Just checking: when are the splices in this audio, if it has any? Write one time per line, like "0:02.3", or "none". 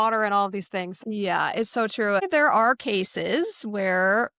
0:01.0
0:02.3